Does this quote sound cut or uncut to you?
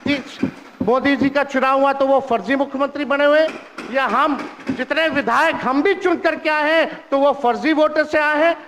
uncut